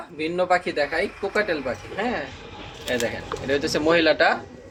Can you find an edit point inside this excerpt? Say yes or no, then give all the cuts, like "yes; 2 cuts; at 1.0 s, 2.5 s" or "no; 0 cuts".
no; 0 cuts